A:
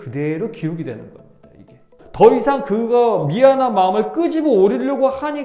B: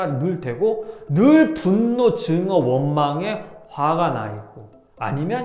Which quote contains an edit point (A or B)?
A